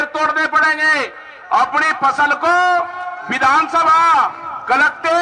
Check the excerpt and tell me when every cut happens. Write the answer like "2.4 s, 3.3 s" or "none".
none